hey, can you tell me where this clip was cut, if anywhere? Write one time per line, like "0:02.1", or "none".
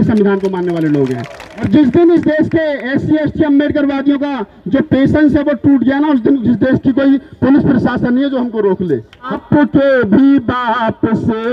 0:01.7
0:09.3